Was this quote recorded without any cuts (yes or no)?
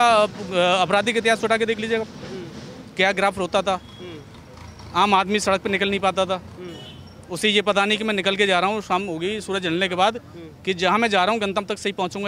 yes